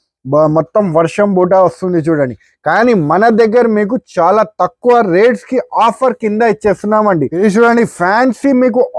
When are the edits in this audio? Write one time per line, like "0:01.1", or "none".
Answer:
0:07.3